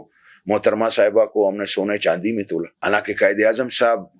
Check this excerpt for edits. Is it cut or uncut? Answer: cut